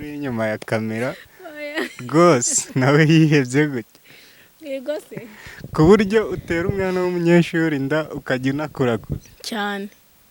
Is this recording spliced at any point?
no; 0 cuts

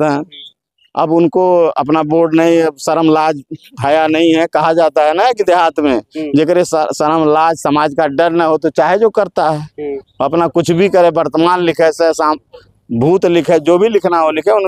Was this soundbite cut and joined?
no; 0 cuts

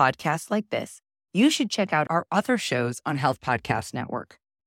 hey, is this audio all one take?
yes; 0 cuts

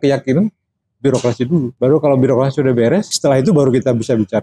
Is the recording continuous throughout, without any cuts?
no; 2 cuts; at 1.7 s, 3.1 s

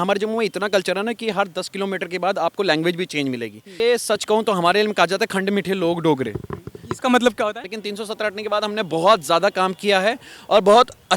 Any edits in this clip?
yes; 2 cuts; at 3.8 s, 7.7 s

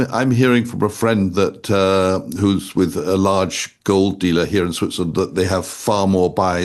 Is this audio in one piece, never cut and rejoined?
yes; 0 cuts

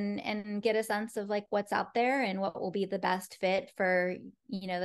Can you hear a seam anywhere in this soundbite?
no; 0 cuts

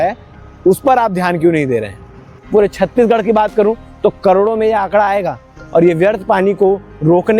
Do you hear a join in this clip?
yes; 1 cut; at 2.4 s

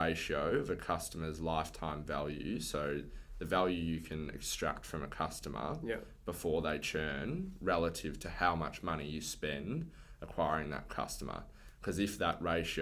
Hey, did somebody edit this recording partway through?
no; 0 cuts

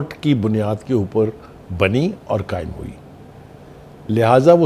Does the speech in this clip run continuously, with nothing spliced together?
yes; 0 cuts

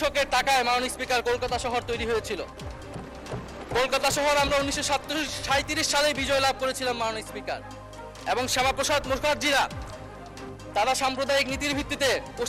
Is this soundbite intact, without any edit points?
yes; 0 cuts

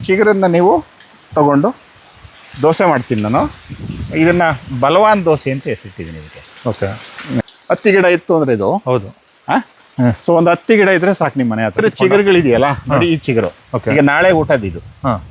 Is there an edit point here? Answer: yes; 2 cuts; at 7.4 s, 11.8 s

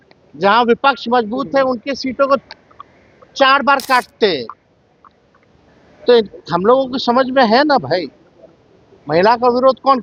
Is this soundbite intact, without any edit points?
yes; 0 cuts

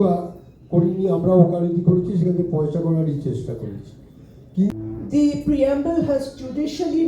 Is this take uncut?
no; 1 cut; at 4.7 s

